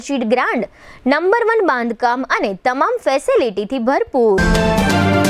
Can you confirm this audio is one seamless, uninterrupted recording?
no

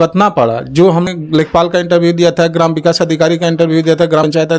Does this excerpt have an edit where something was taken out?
yes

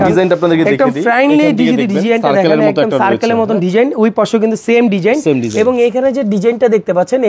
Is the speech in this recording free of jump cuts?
yes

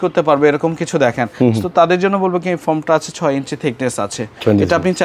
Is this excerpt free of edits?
yes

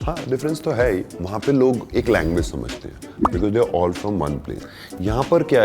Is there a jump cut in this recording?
yes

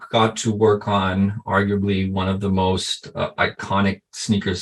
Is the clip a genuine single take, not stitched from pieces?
yes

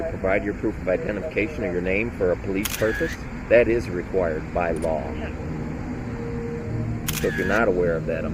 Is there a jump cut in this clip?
no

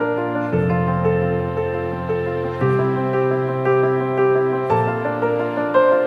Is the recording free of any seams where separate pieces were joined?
yes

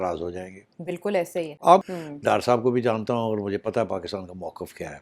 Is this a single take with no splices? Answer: no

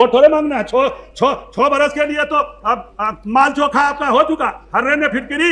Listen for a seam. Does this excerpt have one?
no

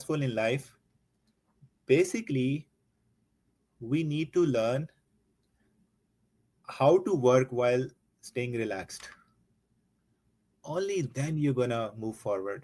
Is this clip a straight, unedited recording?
yes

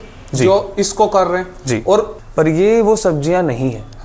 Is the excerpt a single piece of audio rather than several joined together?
no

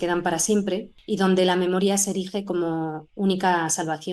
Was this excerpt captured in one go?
no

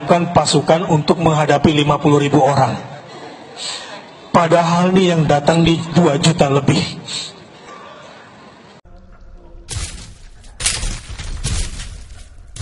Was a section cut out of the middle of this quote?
yes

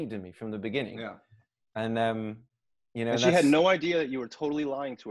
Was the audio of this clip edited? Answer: no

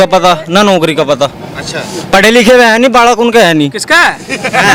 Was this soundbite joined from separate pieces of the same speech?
no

